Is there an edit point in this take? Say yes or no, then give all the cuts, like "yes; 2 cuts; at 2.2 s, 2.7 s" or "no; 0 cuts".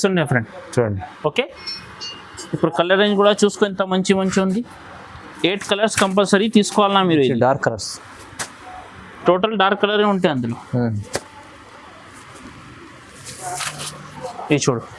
no; 0 cuts